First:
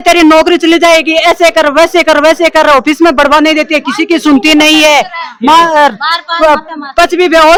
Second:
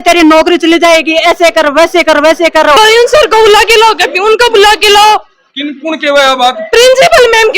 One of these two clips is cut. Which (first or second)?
second